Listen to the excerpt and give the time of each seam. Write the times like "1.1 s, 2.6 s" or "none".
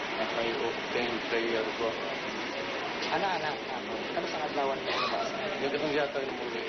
4.7 s